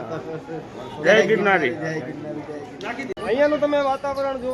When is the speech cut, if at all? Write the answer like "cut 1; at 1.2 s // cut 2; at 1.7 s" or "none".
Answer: cut 1; at 3.2 s